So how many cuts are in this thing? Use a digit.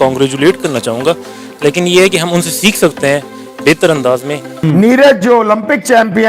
1